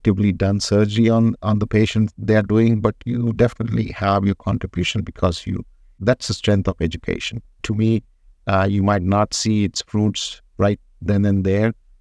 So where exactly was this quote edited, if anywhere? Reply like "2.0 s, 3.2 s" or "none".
none